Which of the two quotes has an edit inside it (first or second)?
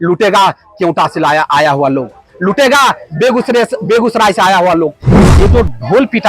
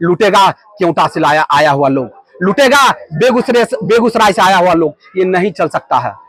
first